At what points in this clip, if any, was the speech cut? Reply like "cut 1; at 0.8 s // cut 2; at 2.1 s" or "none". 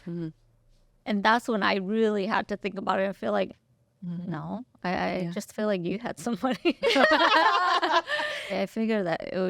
cut 1; at 8.5 s